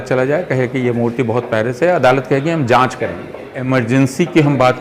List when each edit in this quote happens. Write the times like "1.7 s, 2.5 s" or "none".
3.6 s